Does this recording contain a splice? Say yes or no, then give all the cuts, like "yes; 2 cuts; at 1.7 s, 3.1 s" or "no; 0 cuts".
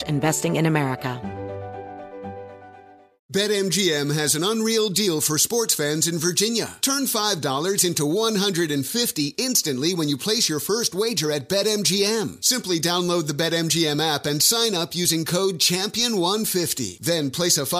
yes; 1 cut; at 1.2 s